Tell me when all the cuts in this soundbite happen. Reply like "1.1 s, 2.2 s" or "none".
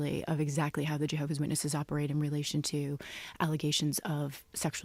none

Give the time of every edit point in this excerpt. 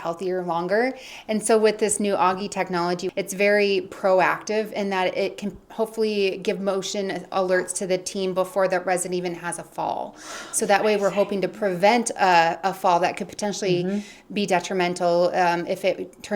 3.0 s

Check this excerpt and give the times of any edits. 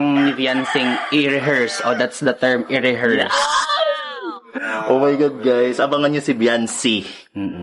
none

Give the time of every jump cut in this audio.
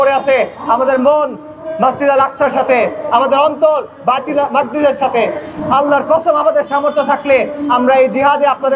none

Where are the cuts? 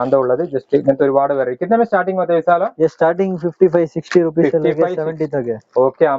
none

